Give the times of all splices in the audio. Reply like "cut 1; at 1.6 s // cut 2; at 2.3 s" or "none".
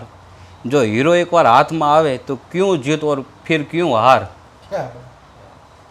none